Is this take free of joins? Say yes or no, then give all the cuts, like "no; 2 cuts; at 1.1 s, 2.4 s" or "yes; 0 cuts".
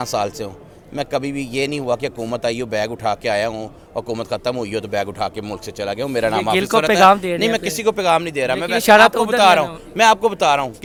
yes; 0 cuts